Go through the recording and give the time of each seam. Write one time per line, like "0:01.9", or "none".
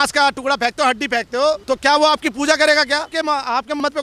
0:01.6
0:03.1